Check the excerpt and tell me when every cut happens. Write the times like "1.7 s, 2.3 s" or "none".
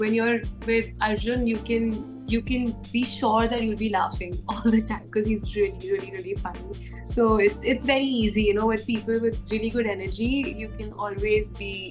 none